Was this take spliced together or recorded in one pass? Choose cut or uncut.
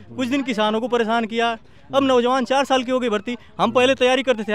uncut